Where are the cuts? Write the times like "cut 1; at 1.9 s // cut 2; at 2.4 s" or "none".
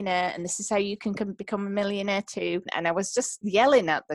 cut 1; at 2.7 s